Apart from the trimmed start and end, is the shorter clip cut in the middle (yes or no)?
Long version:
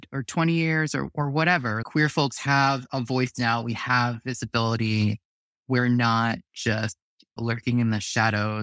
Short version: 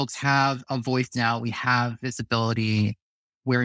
no